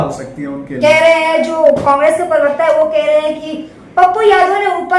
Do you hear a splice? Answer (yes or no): no